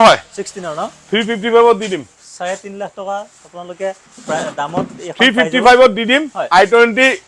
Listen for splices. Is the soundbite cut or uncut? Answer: uncut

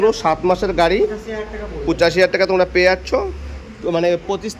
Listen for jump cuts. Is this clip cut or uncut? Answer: uncut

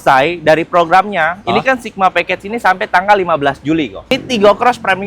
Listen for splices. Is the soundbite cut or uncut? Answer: cut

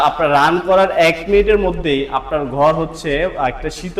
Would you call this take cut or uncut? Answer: uncut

